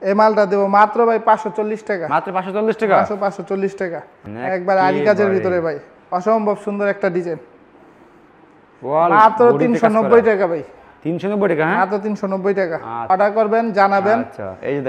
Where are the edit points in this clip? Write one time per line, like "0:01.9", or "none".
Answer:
0:04.2
0:13.1